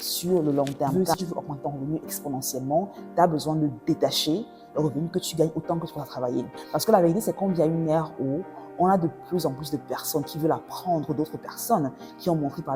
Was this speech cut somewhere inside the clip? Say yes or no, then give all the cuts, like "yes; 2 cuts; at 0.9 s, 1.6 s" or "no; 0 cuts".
yes; 2 cuts; at 1.1 s, 6.6 s